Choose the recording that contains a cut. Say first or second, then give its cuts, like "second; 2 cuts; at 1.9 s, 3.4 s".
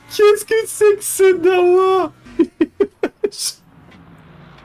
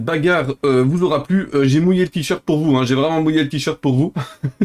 first; 1 cut; at 2.2 s